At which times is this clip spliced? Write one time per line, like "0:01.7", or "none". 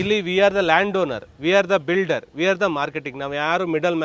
none